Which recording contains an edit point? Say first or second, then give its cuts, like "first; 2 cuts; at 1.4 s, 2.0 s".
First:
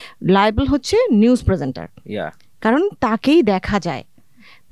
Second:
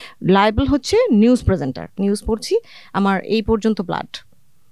second; 1 cut; at 1.8 s